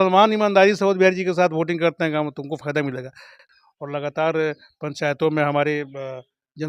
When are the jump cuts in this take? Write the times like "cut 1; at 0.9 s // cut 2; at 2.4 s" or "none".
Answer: cut 1; at 3.4 s